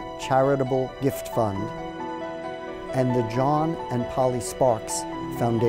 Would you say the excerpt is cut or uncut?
uncut